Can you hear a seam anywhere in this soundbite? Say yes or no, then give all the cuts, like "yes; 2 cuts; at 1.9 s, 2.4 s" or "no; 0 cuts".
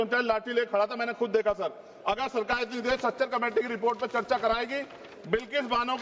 no; 0 cuts